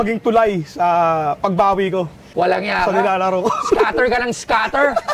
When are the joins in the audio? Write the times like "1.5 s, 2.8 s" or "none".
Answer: 2.2 s